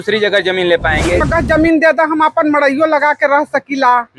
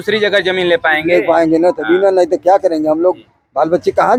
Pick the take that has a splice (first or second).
first